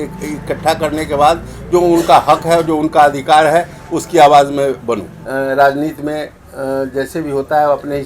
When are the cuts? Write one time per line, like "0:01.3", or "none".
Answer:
0:05.2